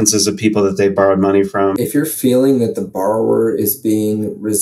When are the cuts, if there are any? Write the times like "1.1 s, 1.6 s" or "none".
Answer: 1.7 s

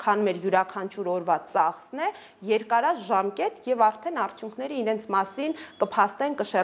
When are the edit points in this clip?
none

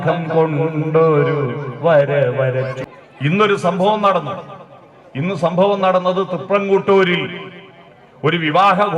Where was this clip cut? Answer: 2.8 s

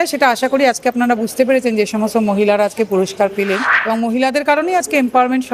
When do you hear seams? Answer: 3.7 s

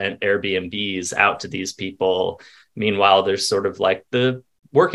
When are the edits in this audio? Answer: none

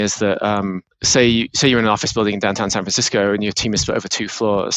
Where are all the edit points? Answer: 0.9 s

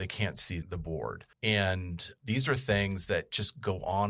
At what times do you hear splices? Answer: 1.0 s

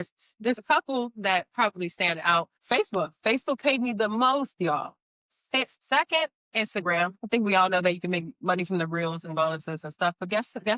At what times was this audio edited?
2.5 s, 5.7 s

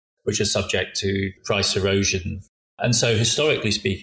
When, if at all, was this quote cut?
1.4 s, 2.8 s

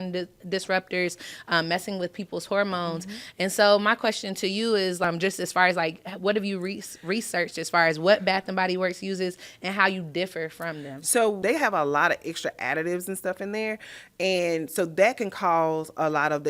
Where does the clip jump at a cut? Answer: 5.0 s, 11.4 s

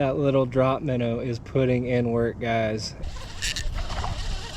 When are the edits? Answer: 2.9 s

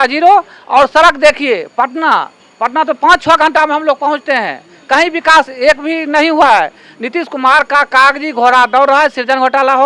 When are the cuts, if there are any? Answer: none

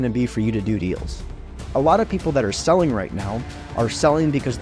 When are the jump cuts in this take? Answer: 1.6 s

